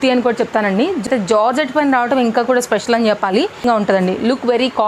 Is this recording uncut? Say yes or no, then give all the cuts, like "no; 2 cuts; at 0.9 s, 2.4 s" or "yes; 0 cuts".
no; 2 cuts; at 1.1 s, 3.6 s